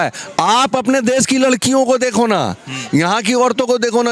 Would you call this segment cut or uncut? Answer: uncut